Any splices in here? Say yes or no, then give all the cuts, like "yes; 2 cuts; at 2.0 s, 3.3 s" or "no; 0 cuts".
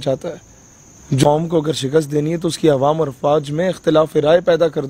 yes; 1 cut; at 1.2 s